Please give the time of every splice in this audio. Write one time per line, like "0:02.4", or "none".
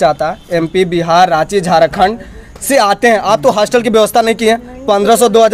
none